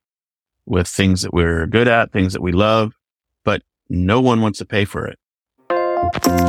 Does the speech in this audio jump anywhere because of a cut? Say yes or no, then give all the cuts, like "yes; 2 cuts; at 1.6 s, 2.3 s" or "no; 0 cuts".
yes; 1 cut; at 5.6 s